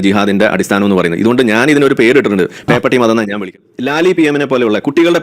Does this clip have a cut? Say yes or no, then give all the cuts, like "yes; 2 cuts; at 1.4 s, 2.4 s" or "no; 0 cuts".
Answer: yes; 1 cut; at 3.6 s